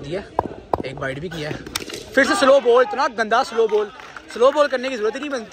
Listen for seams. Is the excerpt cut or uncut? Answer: uncut